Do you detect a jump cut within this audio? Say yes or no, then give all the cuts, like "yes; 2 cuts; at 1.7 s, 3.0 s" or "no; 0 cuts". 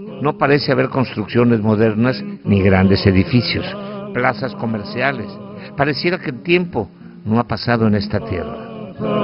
yes; 1 cut; at 4.4 s